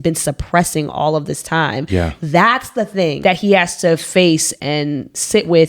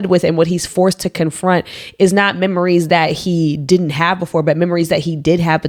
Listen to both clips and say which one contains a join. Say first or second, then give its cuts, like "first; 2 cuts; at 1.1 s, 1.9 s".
first; 2 cuts; at 3.2 s, 4.5 s